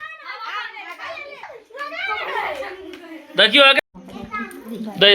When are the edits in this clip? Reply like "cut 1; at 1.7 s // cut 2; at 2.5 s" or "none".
cut 1; at 3.8 s